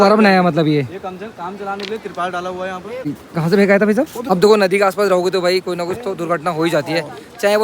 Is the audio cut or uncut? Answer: cut